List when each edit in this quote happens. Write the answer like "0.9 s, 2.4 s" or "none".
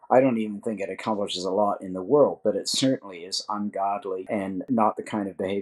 4.6 s